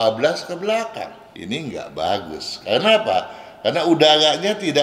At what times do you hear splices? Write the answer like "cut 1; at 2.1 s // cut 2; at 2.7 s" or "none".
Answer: cut 1; at 1.3 s

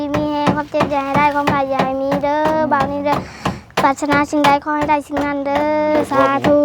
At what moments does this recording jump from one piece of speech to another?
none

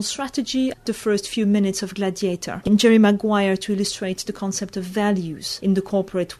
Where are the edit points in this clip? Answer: cut 1; at 0.8 s // cut 2; at 2.5 s // cut 3; at 5.4 s

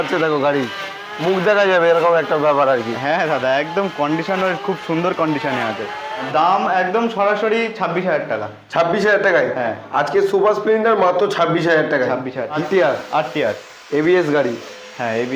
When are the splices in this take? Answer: cut 1; at 6.3 s // cut 2; at 12.6 s

